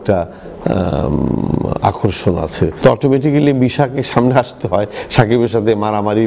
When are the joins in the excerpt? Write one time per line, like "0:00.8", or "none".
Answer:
0:02.7